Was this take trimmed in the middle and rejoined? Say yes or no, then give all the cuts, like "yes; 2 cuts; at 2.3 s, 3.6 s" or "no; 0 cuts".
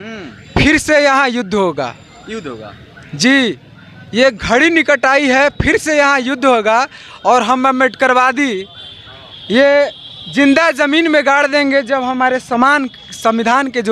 no; 0 cuts